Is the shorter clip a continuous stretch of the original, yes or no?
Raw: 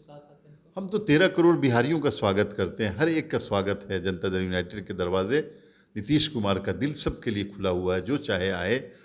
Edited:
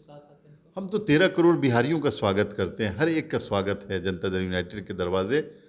yes